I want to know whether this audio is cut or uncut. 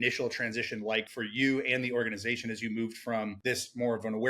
cut